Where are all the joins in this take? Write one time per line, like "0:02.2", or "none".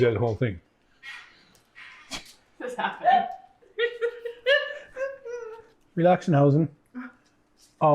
0:03.6
0:05.7